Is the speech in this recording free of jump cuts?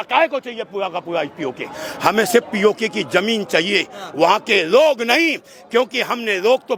yes; 0 cuts

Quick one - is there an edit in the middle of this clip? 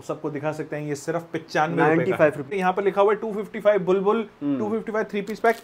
yes; 1 cut; at 2.5 s

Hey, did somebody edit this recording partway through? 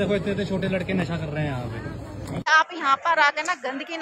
yes; 1 cut; at 2.5 s

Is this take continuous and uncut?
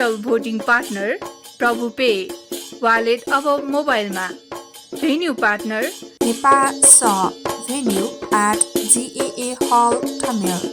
yes; 0 cuts

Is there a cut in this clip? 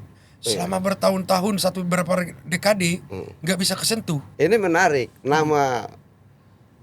yes; 1 cut; at 4.3 s

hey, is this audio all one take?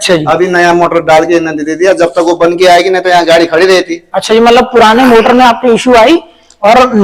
yes; 0 cuts

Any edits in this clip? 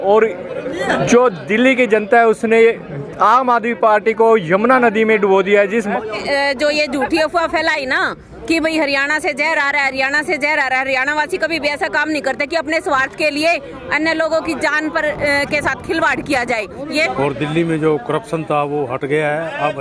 yes; 2 cuts; at 5.9 s, 17.1 s

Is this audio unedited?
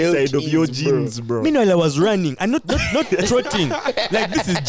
yes; 0 cuts

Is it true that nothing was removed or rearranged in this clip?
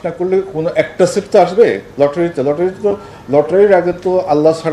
yes; 0 cuts

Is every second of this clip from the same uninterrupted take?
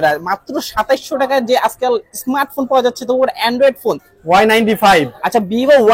no; 1 cut; at 4.1 s

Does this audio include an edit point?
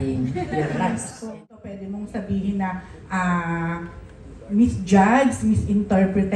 yes; 1 cut; at 1.3 s

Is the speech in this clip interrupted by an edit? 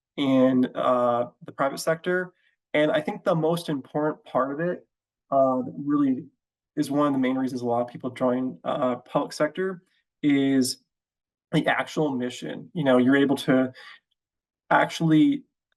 no; 0 cuts

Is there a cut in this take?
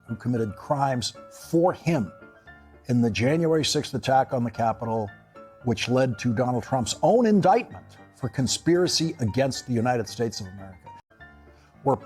yes; 1 cut; at 11.0 s

